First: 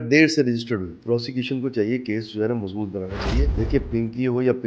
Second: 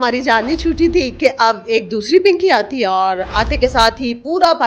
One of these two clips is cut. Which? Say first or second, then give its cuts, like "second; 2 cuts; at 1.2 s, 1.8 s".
first; 2 cuts; at 1.0 s, 3.5 s